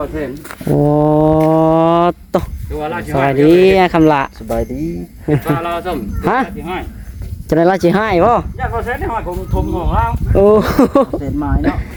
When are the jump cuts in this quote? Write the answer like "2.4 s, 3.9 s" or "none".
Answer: none